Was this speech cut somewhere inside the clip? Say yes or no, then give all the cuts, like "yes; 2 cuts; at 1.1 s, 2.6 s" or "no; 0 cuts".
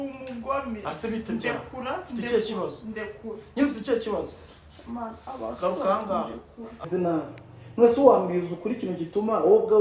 yes; 1 cut; at 6.9 s